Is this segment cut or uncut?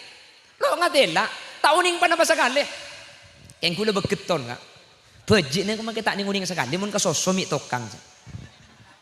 uncut